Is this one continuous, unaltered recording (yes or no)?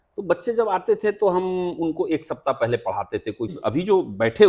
no